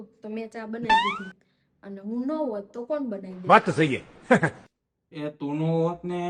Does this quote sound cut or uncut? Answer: uncut